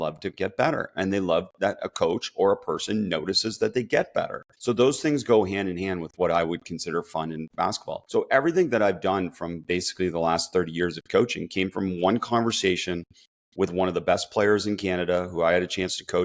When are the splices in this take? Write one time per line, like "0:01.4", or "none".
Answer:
0:04.4
0:07.9